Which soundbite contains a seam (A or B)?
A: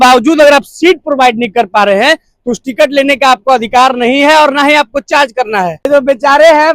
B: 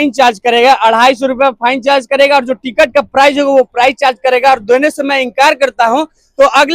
A